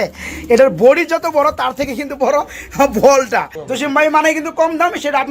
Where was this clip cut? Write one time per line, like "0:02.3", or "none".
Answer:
0:03.6